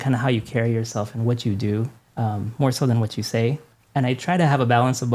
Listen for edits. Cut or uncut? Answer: cut